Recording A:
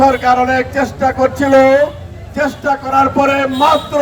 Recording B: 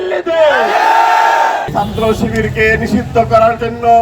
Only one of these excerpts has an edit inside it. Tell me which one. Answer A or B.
B